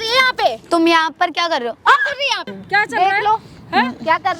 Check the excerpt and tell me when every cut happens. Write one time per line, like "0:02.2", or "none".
0:02.5